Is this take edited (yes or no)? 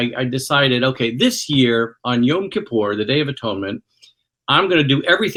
no